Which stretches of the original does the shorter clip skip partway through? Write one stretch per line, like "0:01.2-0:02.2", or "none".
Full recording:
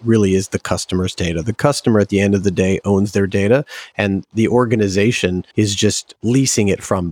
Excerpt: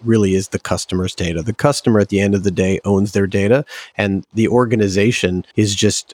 none